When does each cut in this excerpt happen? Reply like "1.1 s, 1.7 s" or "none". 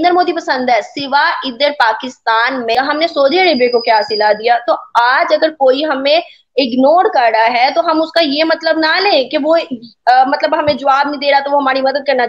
2.8 s